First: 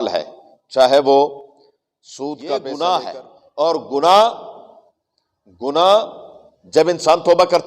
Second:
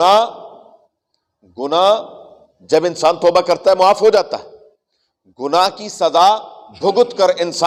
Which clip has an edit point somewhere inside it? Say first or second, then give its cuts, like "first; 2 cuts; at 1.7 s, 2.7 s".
first; 1 cut; at 2.3 s